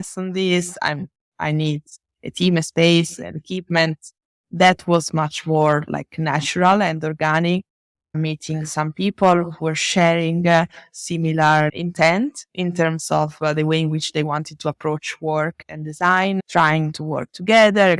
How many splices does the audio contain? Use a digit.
0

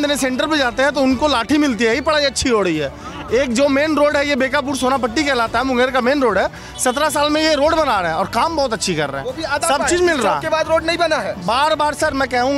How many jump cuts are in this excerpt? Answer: 0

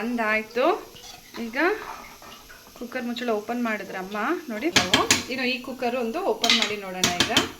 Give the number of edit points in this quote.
1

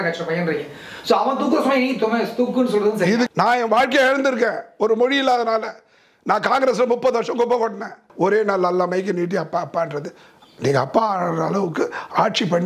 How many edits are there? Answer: 2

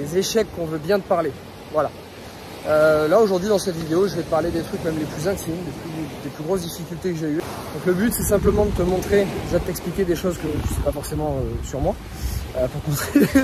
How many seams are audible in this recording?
1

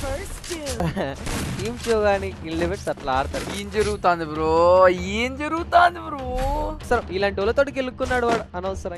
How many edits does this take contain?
1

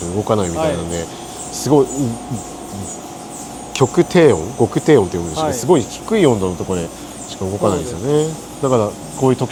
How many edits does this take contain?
0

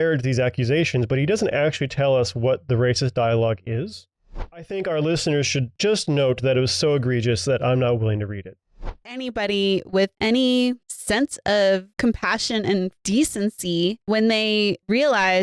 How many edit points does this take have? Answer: 3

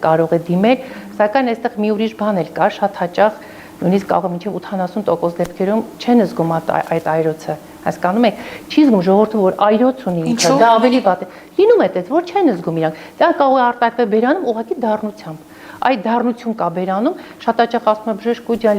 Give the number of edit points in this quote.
0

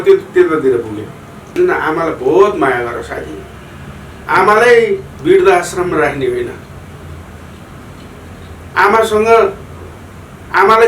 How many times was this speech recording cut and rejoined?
1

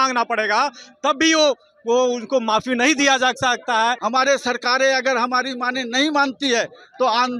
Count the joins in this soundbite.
1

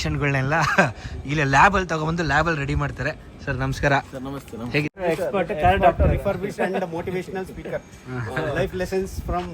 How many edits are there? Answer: 1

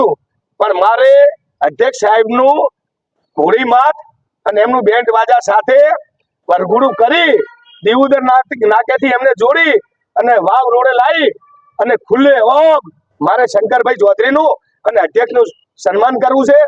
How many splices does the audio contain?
0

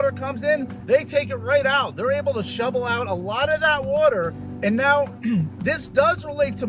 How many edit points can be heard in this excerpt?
0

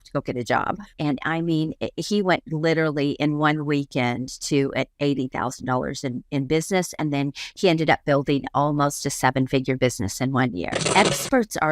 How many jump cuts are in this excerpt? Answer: 2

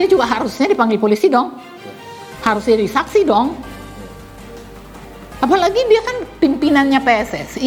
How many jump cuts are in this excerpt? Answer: 0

